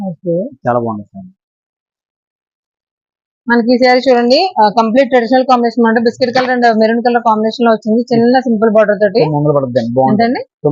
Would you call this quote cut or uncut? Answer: uncut